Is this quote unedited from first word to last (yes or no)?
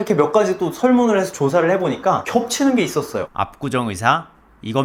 no